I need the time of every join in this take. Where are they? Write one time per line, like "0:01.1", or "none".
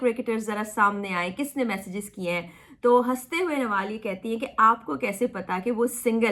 none